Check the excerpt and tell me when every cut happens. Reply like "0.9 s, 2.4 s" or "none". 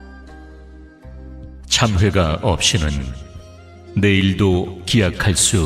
1.7 s